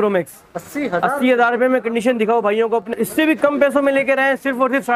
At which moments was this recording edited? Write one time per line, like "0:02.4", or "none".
0:02.9